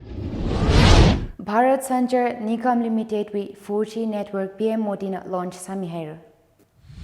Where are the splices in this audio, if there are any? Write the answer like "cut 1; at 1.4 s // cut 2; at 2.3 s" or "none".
cut 1; at 1.1 s